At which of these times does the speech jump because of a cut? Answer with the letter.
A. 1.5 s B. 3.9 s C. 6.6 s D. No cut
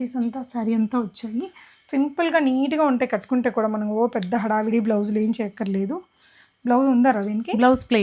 D